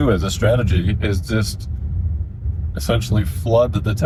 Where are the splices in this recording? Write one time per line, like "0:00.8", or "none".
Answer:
none

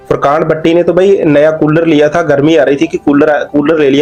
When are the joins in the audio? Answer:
none

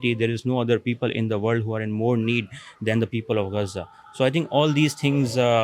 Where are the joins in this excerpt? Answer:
none

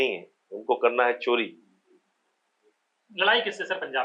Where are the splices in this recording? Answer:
none

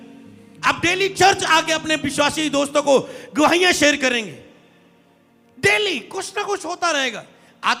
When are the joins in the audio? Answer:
none

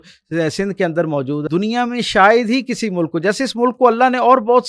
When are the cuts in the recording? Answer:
0:01.4

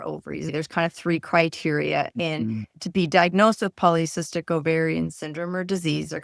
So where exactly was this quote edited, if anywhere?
none

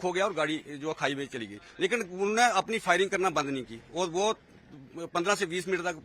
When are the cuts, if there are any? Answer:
none

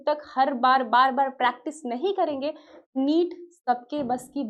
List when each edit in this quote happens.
none

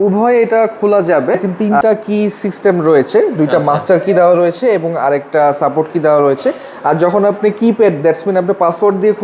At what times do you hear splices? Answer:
0:01.6

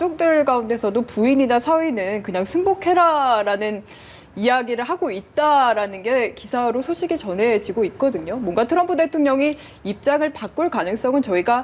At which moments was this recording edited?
none

